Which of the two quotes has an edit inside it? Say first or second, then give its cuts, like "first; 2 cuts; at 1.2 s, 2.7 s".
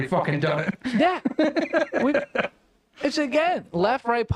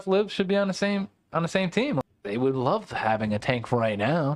second; 1 cut; at 2.0 s